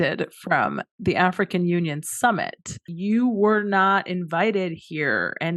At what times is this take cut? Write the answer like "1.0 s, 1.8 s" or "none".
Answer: 2.9 s

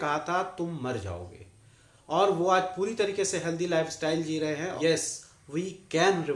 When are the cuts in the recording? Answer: 4.7 s

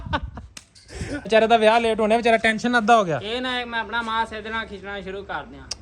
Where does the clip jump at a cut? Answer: 1.3 s

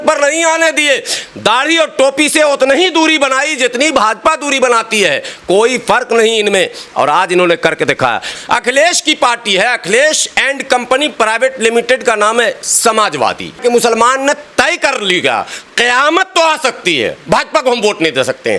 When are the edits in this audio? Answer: 8.3 s, 13.5 s

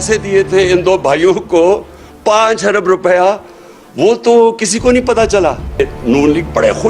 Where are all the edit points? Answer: 5.8 s

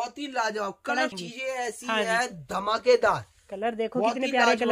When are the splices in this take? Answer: 1.1 s

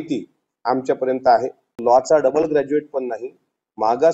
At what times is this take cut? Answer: 1.7 s

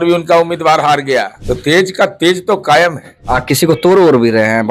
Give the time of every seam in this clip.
1.4 s, 3.1 s

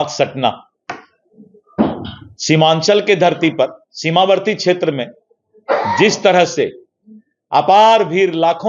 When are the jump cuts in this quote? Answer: none

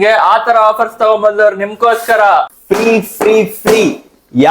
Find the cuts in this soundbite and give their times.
2.5 s

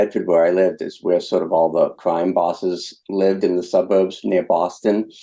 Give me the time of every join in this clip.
2.0 s, 2.9 s

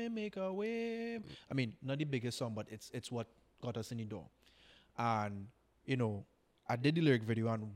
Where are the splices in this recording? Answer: none

